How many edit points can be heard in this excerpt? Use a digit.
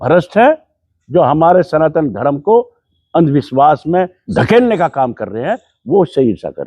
1